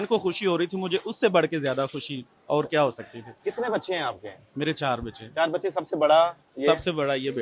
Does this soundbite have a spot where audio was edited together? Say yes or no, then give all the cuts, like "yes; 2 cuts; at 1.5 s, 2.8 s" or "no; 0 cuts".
no; 0 cuts